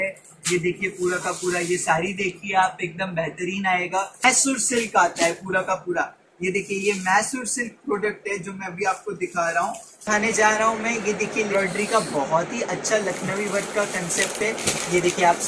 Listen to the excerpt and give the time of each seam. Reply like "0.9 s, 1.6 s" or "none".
4.2 s, 10.0 s